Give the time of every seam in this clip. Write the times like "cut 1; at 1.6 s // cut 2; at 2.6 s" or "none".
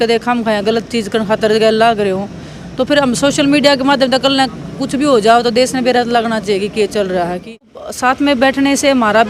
cut 1; at 7.8 s